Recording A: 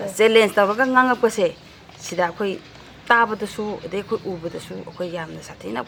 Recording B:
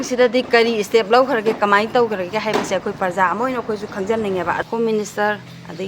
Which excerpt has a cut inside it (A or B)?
B